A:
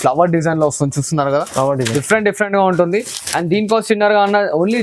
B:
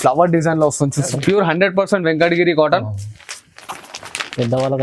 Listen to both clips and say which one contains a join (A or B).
B